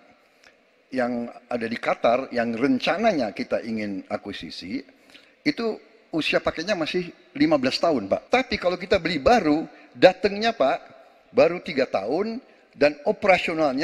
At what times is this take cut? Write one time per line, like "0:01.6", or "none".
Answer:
0:08.2